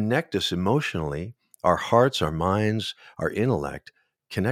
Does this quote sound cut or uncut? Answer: uncut